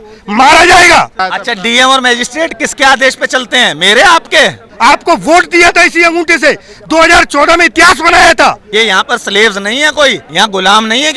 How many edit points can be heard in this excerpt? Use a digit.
4